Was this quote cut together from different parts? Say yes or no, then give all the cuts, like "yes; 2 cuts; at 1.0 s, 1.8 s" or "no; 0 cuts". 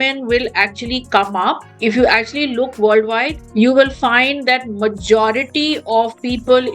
yes; 1 cut; at 1.7 s